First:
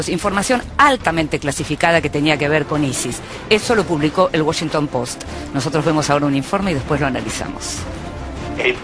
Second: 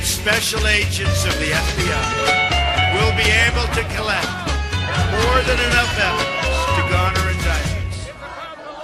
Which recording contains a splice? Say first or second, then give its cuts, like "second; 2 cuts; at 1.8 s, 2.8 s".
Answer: second; 1 cut; at 6.6 s